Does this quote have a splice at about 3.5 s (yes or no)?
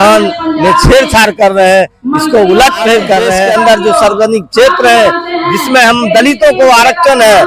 yes